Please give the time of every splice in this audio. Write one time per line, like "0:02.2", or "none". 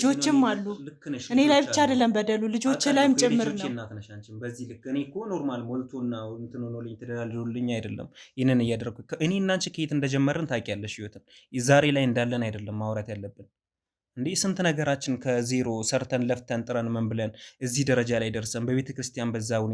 none